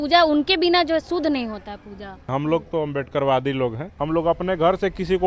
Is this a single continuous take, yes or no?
no